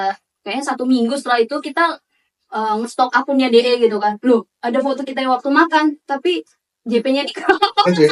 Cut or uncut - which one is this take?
uncut